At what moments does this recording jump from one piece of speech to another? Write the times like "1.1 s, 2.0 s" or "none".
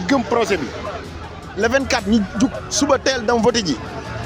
none